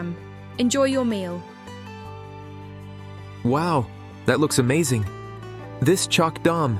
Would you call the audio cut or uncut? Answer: cut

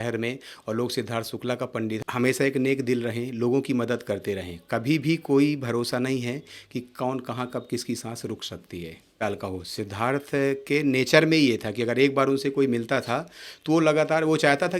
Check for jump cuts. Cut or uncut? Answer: cut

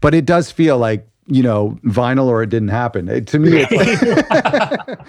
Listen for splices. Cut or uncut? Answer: cut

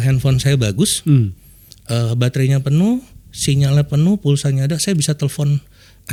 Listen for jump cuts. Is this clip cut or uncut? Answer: uncut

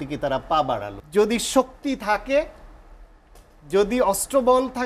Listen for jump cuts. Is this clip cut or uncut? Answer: cut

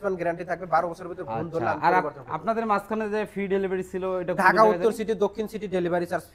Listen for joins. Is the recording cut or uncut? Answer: uncut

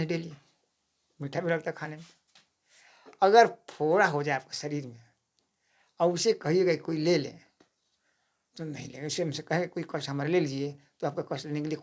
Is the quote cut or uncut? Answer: uncut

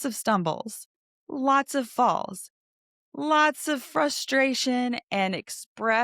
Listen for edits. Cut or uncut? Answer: uncut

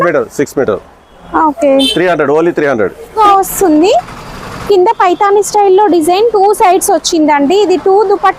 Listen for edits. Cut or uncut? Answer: cut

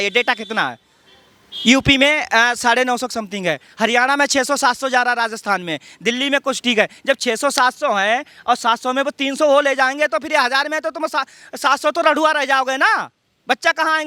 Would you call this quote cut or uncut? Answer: uncut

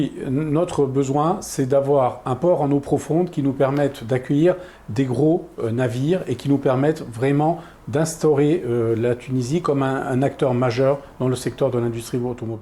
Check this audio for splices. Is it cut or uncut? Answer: uncut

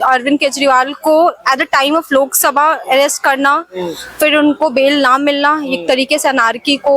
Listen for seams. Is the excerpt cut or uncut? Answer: uncut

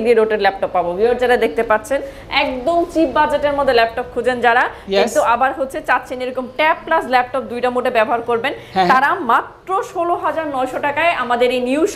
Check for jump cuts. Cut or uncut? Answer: uncut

